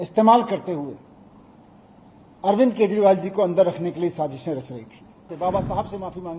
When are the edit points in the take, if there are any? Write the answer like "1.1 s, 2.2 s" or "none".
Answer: 5.3 s